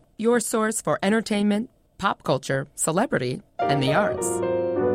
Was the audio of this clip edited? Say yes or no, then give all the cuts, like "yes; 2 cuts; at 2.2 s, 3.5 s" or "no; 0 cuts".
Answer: no; 0 cuts